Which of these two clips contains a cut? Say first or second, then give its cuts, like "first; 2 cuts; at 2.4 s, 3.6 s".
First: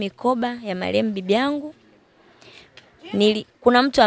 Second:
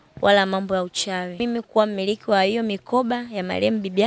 second; 1 cut; at 1.4 s